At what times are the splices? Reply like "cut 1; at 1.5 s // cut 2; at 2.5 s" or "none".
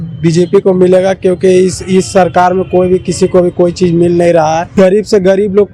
cut 1; at 4.7 s